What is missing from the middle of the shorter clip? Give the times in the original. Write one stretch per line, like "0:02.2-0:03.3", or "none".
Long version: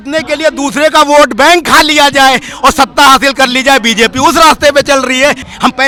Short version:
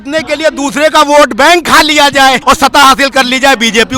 0:02.6-0:02.9

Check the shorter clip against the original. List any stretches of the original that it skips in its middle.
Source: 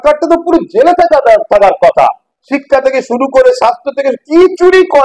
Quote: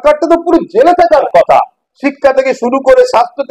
0:01.2-0:01.7

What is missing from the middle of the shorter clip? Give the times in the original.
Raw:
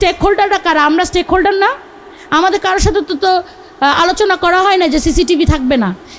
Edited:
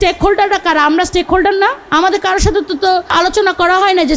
0:01.8-0:02.2
0:03.5-0:03.9

